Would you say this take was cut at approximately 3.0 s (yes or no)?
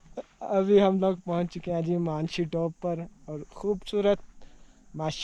no